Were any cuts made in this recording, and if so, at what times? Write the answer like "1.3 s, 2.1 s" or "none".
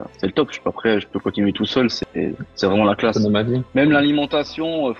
3.6 s